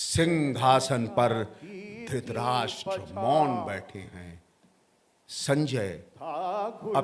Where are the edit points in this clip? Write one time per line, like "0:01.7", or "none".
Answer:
none